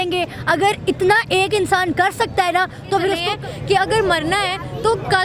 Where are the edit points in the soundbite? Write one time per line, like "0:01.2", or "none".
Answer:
0:03.3